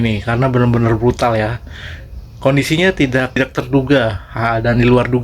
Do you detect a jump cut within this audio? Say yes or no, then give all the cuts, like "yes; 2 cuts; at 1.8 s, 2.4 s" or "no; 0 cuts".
yes; 1 cut; at 3.4 s